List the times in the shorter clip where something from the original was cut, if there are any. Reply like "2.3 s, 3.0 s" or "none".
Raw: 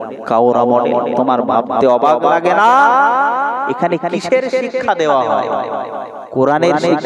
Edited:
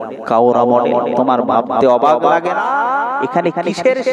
2.6 s